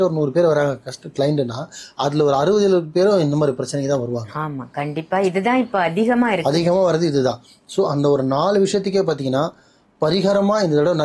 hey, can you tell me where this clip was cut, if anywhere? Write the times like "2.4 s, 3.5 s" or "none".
none